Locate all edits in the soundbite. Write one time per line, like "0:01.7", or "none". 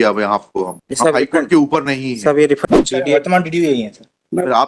0:02.6